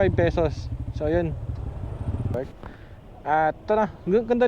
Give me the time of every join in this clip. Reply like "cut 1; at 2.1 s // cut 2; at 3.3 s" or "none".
cut 1; at 2.3 s